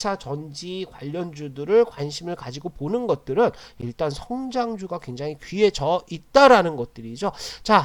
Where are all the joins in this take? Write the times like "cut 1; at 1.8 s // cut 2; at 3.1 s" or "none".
none